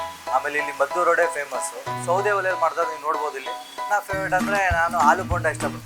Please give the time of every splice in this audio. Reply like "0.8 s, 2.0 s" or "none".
2.0 s, 3.8 s

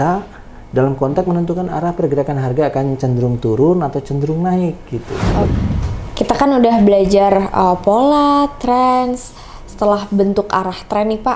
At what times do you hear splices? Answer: 5.5 s

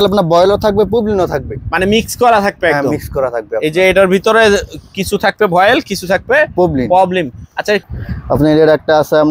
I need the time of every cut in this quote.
7.9 s

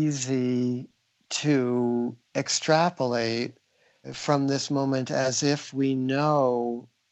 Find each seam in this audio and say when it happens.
4.1 s

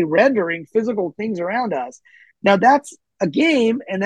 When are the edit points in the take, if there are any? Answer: none

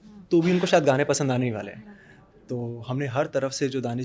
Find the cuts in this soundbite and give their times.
none

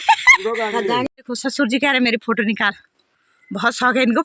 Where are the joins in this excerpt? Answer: 1.1 s

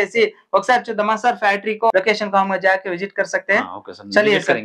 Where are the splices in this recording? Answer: 1.9 s

